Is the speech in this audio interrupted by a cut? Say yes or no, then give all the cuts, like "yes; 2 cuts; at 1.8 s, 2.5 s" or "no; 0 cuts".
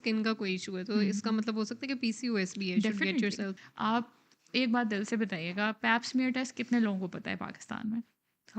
yes; 1 cut; at 3.5 s